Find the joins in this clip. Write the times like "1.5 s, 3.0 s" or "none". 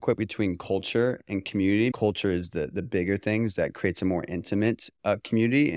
1.9 s

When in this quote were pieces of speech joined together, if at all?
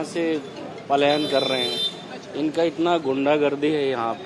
none

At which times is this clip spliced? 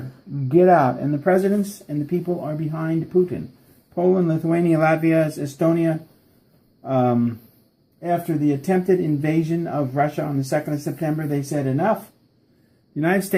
3.1 s

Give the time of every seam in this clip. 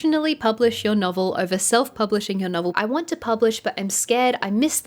2.8 s

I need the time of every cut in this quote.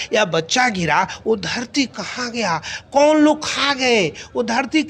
none

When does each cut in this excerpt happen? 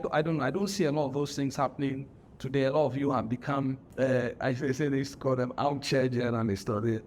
3.8 s

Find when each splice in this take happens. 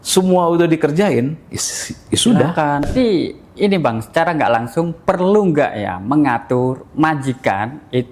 2.9 s

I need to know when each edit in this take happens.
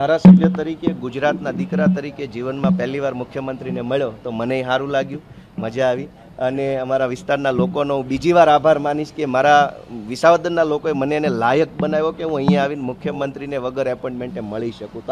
none

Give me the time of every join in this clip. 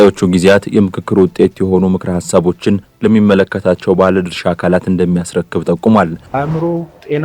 6.2 s

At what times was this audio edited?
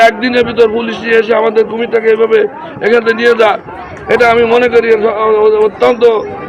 none

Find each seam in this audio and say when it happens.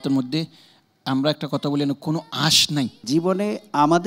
3.0 s

